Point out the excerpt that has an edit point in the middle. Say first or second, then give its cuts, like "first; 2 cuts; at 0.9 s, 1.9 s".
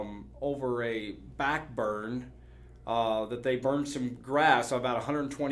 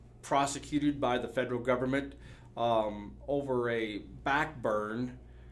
first; 1 cut; at 4.2 s